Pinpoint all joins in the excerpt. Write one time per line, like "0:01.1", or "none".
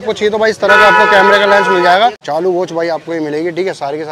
0:02.2